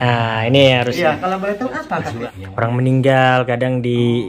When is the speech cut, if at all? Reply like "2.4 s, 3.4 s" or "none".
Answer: 2.3 s